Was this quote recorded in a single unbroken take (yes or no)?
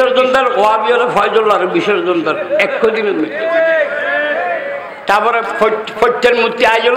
yes